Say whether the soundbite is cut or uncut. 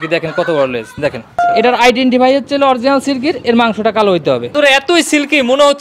cut